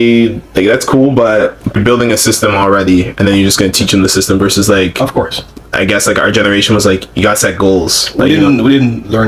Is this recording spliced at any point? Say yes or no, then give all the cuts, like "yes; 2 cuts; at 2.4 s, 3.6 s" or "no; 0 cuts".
yes; 1 cut; at 1.8 s